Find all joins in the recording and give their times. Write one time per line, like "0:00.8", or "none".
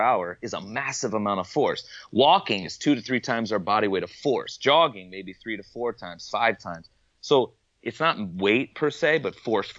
none